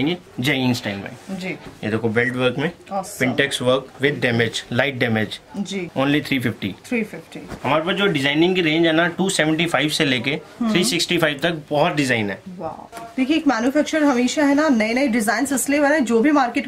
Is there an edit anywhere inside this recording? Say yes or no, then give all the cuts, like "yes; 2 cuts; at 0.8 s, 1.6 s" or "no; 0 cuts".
no; 0 cuts